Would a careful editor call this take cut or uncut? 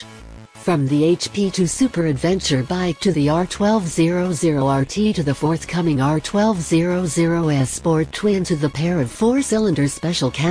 uncut